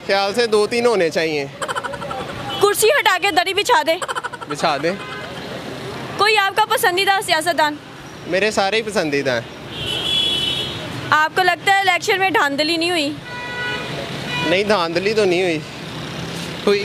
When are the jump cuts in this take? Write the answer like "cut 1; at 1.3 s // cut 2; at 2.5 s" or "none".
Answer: none